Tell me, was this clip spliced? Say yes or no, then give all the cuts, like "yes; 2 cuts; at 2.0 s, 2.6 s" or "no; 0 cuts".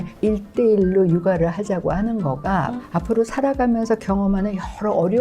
yes; 1 cut; at 2.8 s